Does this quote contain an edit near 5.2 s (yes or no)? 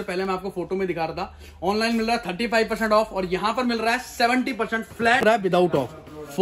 yes